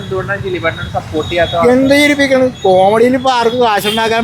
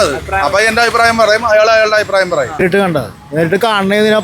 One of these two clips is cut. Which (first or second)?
second